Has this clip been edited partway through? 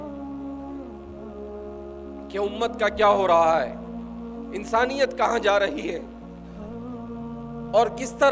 yes; 2 cuts; at 6.0 s, 7.4 s

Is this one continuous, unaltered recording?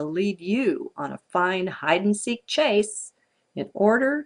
yes; 0 cuts

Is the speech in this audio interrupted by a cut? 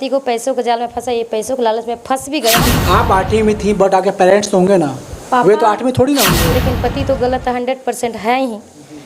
yes; 2 cuts; at 2.6 s, 6.5 s

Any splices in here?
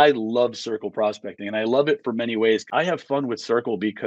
yes; 1 cut; at 2.7 s

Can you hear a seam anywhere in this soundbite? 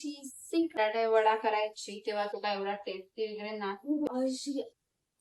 yes; 2 cuts; at 0.7 s, 4.1 s

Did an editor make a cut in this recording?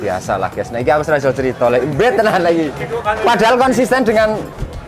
yes; 1 cut; at 2.8 s

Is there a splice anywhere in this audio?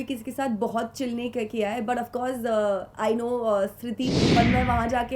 yes; 1 cut; at 4.2 s

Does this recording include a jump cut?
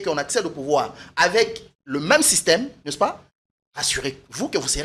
no; 0 cuts

